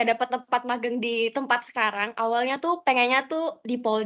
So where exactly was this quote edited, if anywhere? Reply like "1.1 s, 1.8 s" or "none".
none